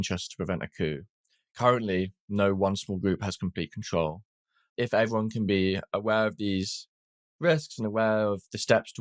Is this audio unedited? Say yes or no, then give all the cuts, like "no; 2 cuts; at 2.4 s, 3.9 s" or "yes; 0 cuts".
no; 1 cut; at 4.6 s